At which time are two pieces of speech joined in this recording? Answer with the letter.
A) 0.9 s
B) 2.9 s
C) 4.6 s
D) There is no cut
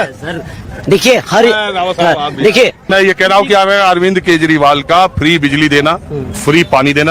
B